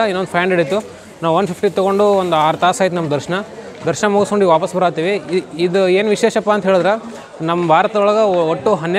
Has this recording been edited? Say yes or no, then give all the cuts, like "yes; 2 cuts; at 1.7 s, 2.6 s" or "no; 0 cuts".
no; 0 cuts